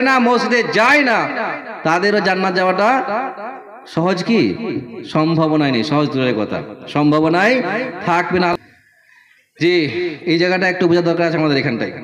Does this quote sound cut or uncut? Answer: cut